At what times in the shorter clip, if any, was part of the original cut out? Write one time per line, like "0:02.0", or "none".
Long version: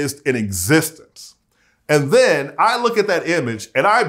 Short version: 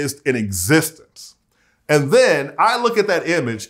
none

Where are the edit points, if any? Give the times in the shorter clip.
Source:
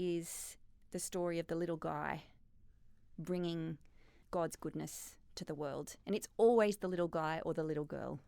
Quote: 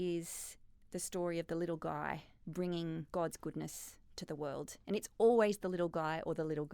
0:02.3
0:03.1

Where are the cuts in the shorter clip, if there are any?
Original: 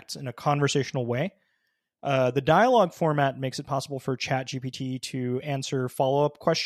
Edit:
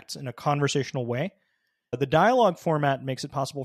0:02.0

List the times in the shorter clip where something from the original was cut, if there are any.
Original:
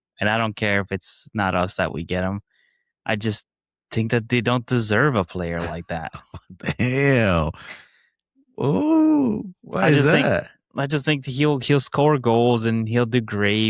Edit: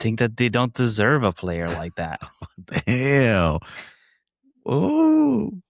none

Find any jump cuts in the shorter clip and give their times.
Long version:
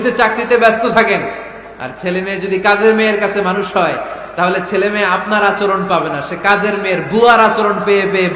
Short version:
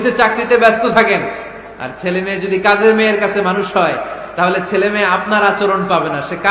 none

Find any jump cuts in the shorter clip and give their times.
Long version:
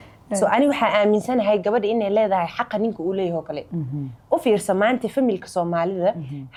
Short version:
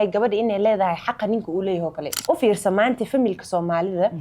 0:02.1

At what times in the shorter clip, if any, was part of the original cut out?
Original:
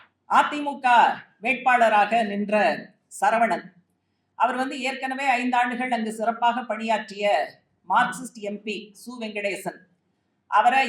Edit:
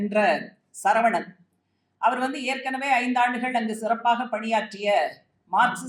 none

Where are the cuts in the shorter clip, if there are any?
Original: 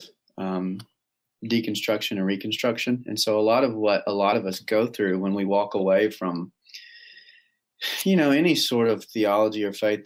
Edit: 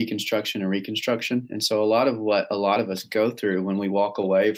none

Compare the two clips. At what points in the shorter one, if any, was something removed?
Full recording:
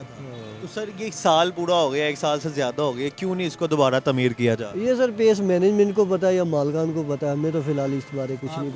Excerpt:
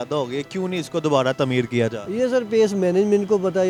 none

